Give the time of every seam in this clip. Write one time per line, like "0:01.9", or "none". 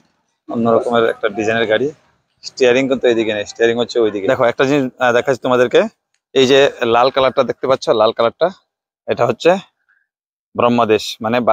0:04.2